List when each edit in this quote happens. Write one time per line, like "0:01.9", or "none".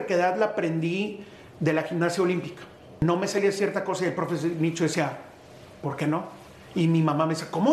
0:03.0